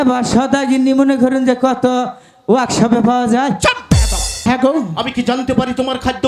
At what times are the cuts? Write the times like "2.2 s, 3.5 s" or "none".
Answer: 4.4 s